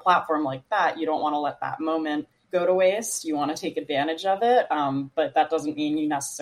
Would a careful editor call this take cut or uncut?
cut